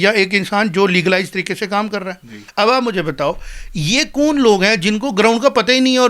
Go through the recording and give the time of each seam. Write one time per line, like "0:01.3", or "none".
0:02.4